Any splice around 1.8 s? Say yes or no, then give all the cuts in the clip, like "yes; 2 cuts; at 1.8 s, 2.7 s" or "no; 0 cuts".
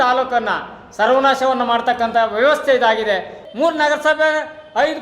no; 1 cut; at 3.4 s